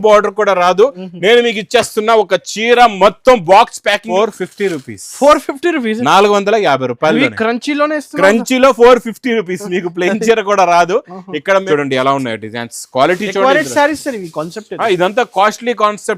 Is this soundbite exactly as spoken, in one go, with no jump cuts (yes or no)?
no